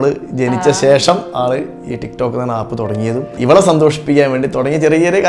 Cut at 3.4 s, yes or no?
yes